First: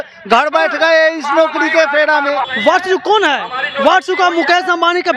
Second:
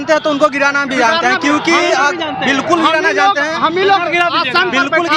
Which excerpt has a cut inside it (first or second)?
first